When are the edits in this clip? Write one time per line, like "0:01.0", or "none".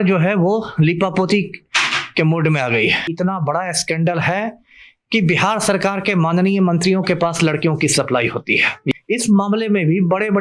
0:03.1
0:09.0